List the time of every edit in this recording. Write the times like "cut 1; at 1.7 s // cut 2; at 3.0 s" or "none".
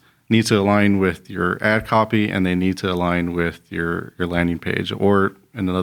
none